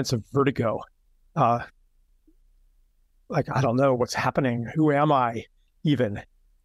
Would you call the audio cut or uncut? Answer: uncut